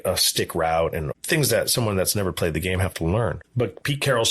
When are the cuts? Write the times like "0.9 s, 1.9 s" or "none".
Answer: 1.1 s, 3.4 s